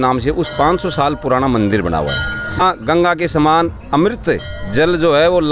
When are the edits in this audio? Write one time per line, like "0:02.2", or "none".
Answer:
0:02.6